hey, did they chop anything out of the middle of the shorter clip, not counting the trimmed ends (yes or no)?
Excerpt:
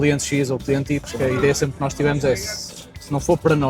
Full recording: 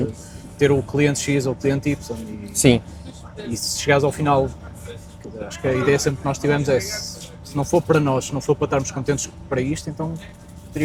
yes